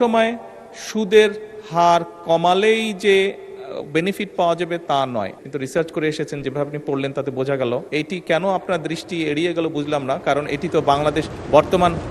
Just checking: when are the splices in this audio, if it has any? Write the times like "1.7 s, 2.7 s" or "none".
5.4 s, 7.9 s